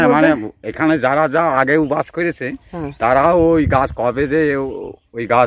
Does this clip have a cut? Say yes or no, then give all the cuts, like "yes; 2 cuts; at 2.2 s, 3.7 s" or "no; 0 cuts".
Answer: no; 0 cuts